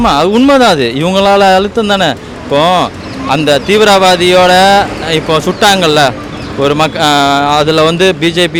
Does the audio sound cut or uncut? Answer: uncut